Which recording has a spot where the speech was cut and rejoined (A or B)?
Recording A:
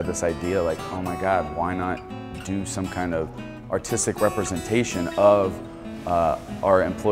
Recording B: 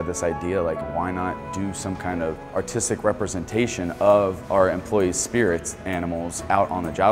B